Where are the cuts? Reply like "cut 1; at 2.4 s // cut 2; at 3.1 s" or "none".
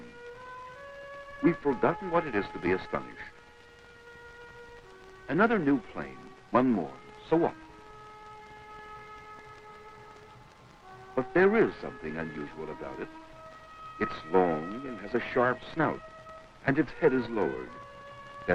none